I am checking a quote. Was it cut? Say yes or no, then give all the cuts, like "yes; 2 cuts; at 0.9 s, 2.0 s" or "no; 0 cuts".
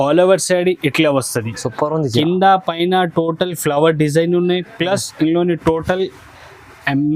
no; 0 cuts